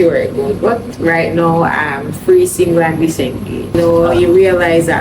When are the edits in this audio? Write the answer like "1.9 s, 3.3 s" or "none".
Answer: 3.7 s